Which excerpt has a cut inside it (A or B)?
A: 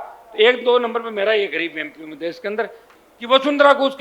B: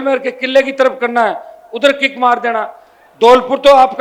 A